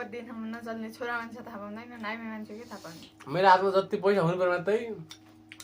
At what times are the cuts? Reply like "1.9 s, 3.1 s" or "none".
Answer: 3.1 s